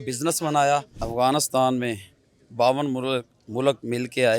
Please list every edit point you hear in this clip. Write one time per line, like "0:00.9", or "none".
0:01.0

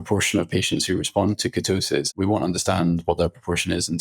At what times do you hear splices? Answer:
0:02.1

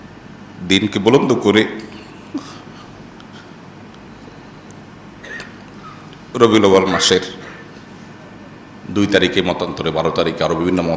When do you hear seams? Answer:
none

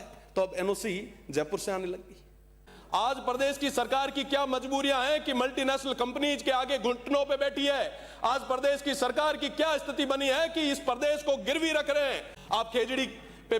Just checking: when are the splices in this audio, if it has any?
0:02.7
0:12.3

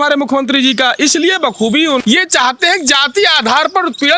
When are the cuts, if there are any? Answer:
0:02.0

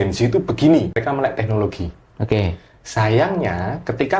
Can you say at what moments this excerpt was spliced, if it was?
0:01.0

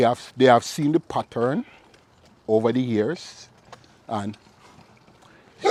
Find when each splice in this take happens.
none

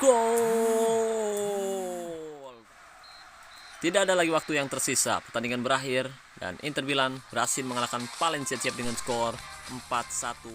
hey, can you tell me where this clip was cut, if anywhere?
0:02.5

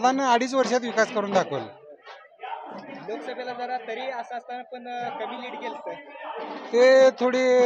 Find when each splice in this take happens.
none

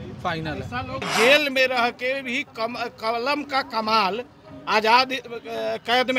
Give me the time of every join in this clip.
0:01.0

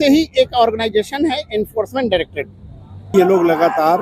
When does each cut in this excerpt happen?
0:03.1

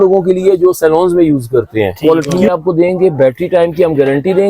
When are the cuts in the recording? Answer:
0:02.0

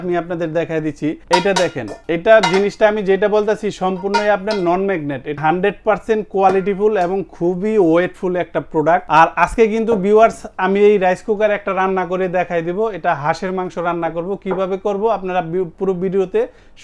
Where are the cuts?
0:01.2
0:01.9
0:05.4
0:09.1

